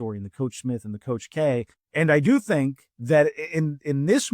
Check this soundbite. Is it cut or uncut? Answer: cut